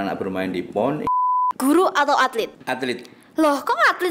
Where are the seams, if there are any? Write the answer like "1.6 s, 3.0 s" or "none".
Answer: 1.1 s, 2.6 s

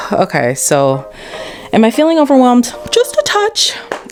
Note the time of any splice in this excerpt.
none

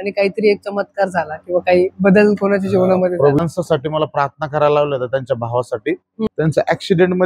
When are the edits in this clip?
3.4 s, 6.3 s

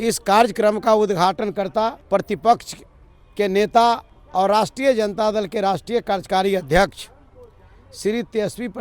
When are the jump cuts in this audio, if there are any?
2.0 s, 4.2 s

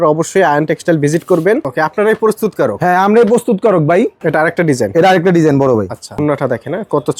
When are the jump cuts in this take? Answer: 1.7 s, 4.2 s, 6.2 s

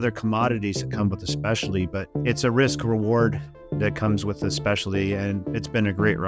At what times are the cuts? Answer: 2.1 s, 5.5 s

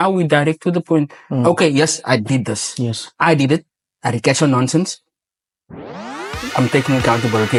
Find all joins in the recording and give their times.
none

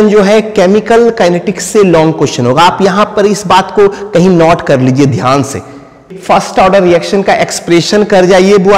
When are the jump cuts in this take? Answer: 6.1 s

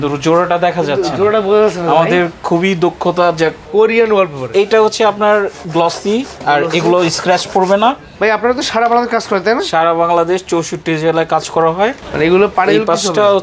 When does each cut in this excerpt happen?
3.6 s, 8.1 s, 12.0 s

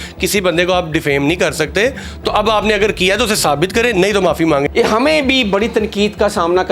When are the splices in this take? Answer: 4.7 s

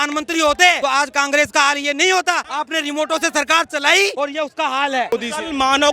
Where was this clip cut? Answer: 0.8 s, 2.5 s, 4.1 s, 5.1 s

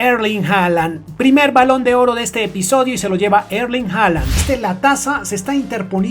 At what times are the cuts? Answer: 4.3 s

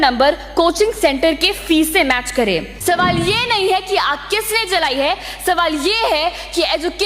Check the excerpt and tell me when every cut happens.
2.7 s

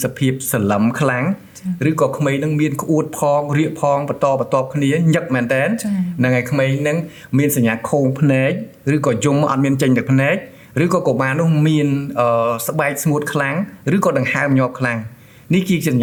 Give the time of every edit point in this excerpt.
none

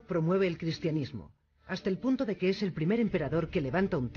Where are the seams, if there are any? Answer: 0.9 s

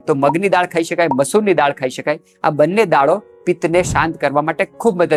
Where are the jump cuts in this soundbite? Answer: none

